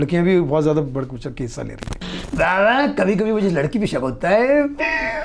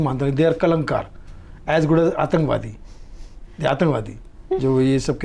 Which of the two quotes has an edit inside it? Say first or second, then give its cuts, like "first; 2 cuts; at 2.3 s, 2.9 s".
first; 1 cut; at 2.2 s